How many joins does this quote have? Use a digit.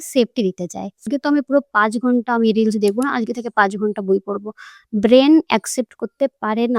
1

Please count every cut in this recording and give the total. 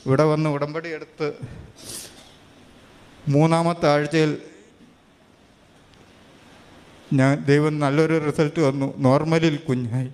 0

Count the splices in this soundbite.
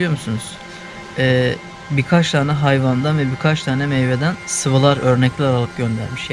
0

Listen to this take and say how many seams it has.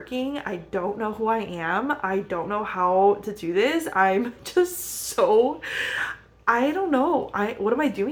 0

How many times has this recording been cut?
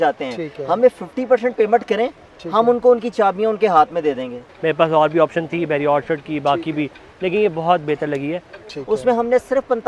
2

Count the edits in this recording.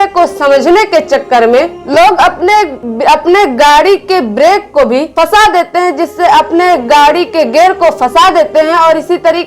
2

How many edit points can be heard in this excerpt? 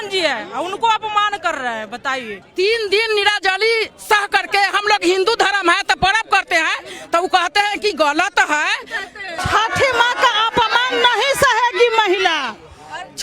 2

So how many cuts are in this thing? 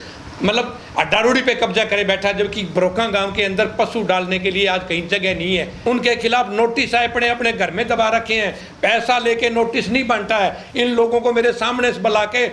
1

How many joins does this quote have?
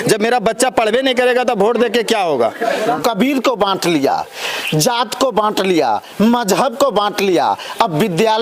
1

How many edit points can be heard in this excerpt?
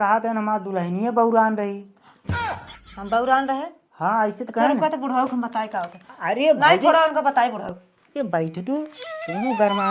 0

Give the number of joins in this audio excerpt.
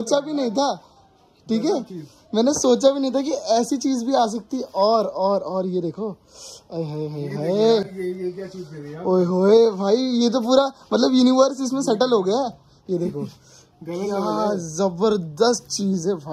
0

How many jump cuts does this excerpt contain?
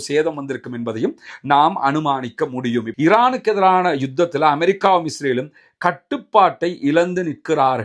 1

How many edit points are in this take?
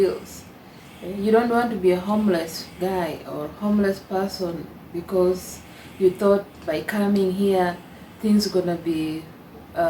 0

